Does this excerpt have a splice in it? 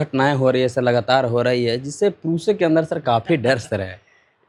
no; 0 cuts

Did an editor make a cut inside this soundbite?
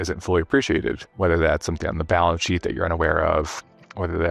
yes; 1 cut; at 1.1 s

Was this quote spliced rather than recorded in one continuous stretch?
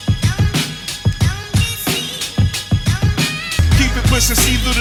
no; 0 cuts

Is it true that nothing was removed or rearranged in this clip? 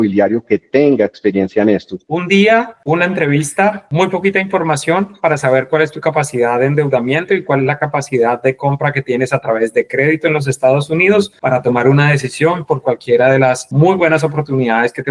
no; 1 cut; at 1.9 s

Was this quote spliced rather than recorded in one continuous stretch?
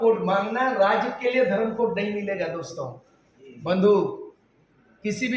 no; 0 cuts

